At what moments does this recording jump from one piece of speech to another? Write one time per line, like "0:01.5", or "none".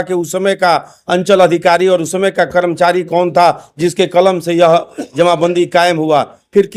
none